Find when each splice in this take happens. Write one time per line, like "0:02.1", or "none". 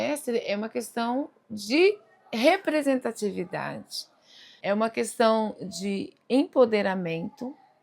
0:04.5